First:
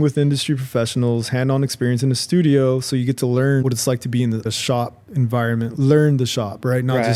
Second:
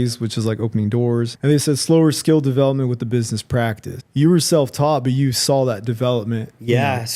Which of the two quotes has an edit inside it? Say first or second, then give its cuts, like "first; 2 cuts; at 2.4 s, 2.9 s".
second; 1 cut; at 1.3 s